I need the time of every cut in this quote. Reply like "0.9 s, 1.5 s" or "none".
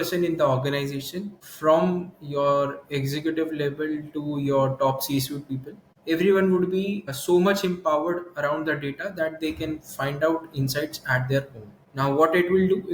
none